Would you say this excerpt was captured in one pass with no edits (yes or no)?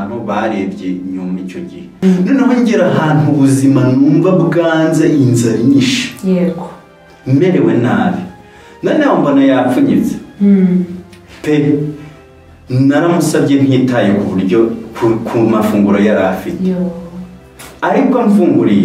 no